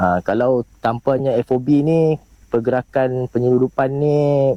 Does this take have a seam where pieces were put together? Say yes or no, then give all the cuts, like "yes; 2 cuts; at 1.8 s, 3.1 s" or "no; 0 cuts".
no; 0 cuts